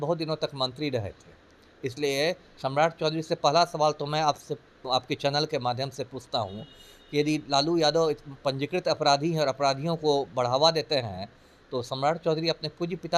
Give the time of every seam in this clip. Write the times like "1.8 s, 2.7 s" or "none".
none